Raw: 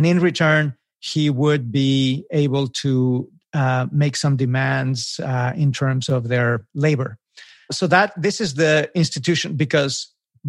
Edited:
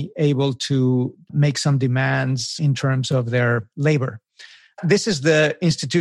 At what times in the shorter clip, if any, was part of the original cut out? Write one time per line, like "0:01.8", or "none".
0:01.3
0:02.6
0:04.8